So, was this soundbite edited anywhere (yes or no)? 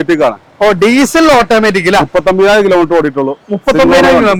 no